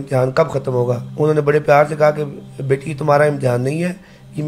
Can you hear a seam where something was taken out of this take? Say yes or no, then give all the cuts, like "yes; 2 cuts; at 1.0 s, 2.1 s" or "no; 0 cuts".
yes; 1 cut; at 1.1 s